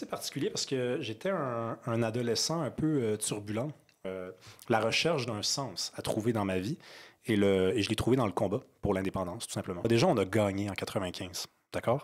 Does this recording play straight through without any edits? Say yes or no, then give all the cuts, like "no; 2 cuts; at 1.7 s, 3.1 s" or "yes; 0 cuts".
no; 2 cuts; at 4.0 s, 9.8 s